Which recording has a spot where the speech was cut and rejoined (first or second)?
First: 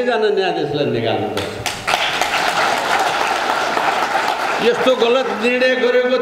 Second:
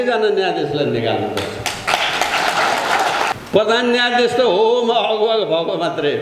second